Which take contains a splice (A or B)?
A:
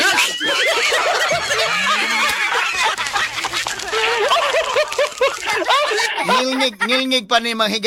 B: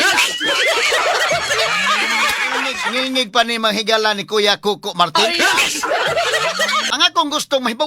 B